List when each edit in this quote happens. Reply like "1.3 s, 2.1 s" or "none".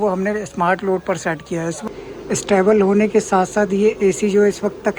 1.8 s